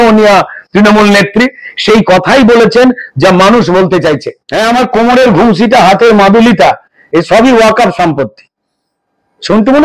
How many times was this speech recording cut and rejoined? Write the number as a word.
one